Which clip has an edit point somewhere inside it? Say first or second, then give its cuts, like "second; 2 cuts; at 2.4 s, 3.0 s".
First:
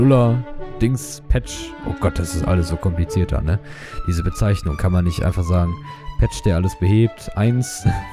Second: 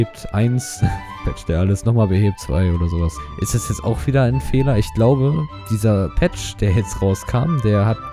second; 1 cut; at 3.2 s